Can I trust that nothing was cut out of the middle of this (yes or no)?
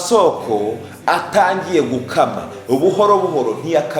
yes